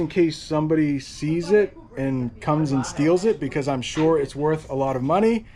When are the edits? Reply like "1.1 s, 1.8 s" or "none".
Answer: none